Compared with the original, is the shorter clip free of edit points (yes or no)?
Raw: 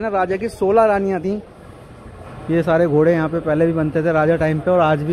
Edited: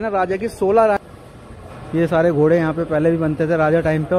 no